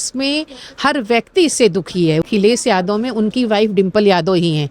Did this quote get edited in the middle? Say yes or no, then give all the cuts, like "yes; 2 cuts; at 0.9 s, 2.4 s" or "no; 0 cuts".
yes; 1 cut; at 2.2 s